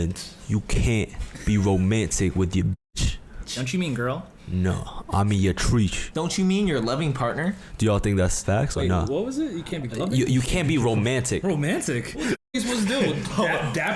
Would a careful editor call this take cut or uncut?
uncut